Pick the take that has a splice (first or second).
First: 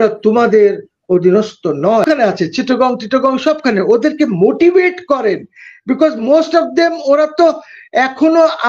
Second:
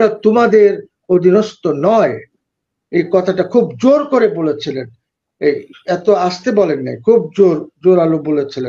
first